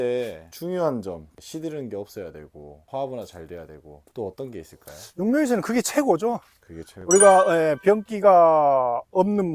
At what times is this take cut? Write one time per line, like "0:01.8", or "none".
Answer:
0:01.3